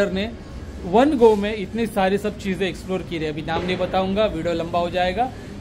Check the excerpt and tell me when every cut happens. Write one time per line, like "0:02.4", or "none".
none